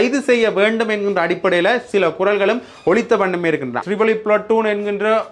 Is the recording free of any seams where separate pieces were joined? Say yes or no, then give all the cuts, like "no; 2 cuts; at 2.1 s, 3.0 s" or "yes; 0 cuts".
no; 1 cut; at 3.8 s